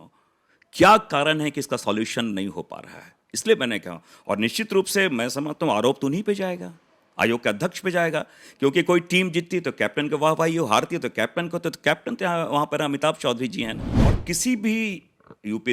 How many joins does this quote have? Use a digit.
1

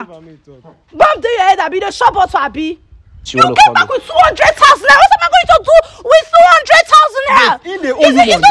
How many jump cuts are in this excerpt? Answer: 1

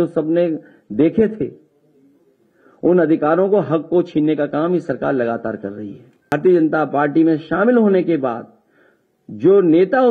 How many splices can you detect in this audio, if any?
1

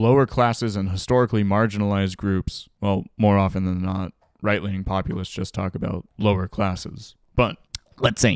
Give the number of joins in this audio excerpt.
0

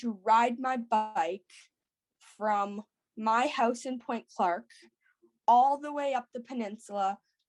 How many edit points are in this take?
0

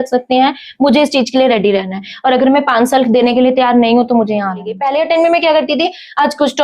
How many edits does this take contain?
1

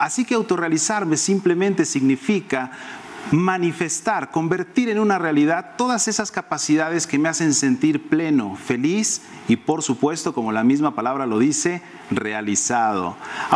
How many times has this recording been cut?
0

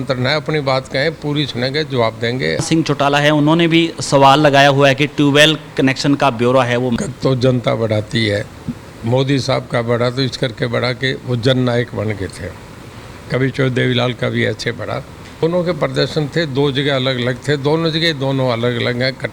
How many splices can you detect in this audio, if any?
3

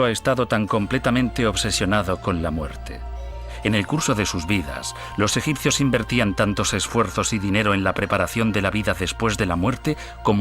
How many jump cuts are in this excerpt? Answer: 1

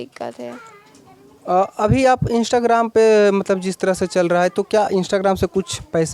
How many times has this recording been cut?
0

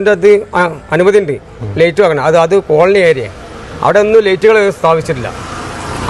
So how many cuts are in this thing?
0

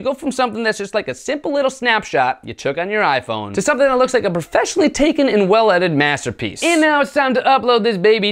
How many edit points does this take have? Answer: 1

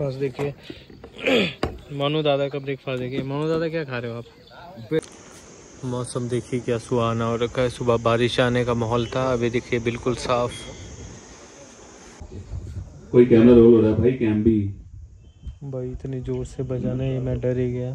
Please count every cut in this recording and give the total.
2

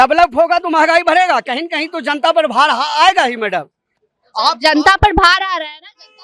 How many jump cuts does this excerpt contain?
0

